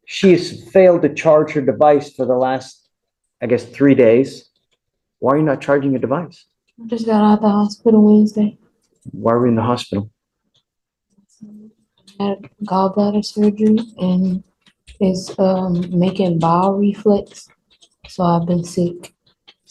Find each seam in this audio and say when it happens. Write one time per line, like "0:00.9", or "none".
none